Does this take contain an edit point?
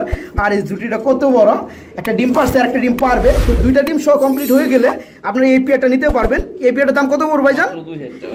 no; 0 cuts

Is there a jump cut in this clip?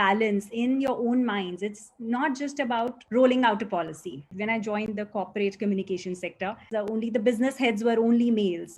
yes; 3 cuts; at 3.0 s, 4.3 s, 6.7 s

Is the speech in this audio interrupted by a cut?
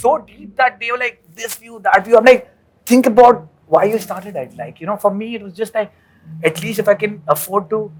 no; 0 cuts

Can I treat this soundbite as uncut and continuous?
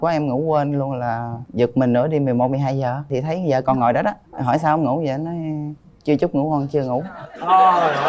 yes; 0 cuts

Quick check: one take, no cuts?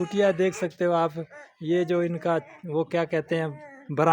yes; 0 cuts

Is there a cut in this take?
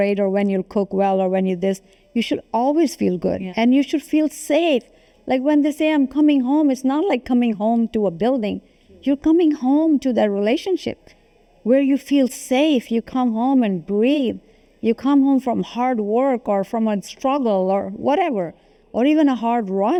no; 0 cuts

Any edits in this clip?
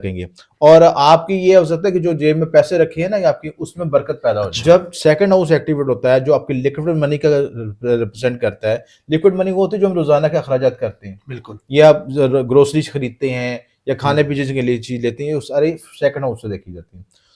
yes; 1 cut; at 4.5 s

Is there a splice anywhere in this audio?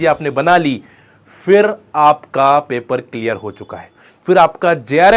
no; 0 cuts

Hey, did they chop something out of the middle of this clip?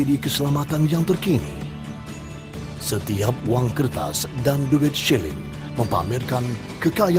no; 0 cuts

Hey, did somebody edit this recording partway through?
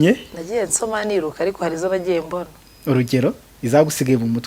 no; 0 cuts

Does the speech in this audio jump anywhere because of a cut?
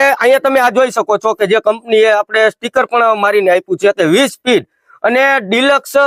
no; 0 cuts

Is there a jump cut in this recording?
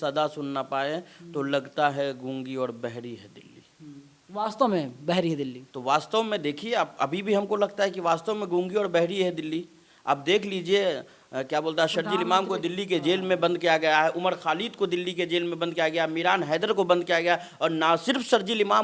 no; 0 cuts

